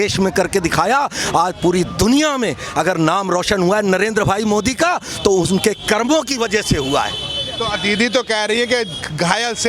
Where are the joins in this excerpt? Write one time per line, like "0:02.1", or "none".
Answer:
none